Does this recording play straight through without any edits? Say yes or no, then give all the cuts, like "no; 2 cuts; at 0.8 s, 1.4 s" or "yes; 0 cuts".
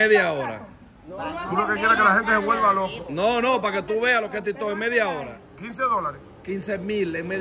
yes; 0 cuts